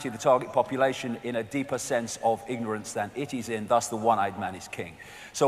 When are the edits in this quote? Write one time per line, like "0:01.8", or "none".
0:02.8